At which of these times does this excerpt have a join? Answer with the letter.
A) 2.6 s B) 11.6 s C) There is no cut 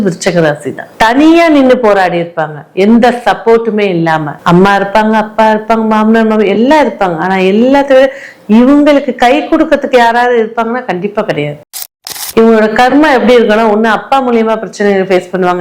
B